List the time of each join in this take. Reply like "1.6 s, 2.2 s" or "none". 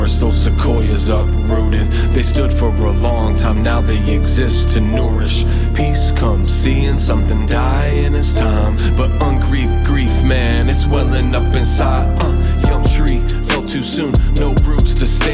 none